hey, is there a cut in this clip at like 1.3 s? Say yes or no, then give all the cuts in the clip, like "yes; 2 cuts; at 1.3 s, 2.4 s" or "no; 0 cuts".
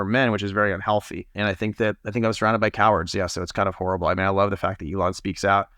yes; 1 cut; at 1.3 s